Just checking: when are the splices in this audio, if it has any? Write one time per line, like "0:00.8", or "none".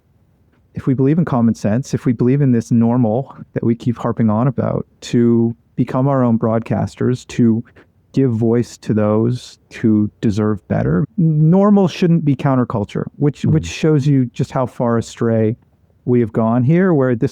0:11.0